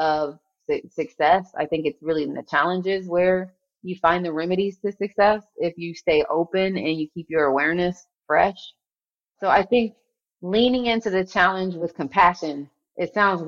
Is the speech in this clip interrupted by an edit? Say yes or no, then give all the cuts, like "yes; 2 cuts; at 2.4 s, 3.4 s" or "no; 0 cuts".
yes; 1 cut; at 8.1 s